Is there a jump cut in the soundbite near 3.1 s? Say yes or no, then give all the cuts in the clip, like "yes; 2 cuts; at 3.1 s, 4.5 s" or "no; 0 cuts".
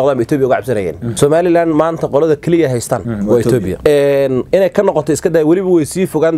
yes; 3 cuts; at 1.0 s, 3.1 s, 3.8 s